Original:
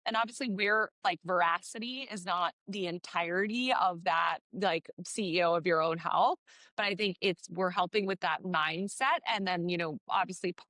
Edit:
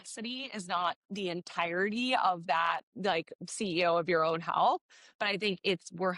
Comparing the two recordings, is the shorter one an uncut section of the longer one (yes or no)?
yes